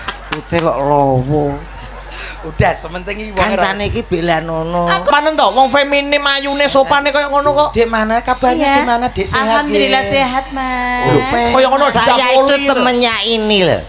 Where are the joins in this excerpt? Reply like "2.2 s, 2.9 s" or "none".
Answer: 5.1 s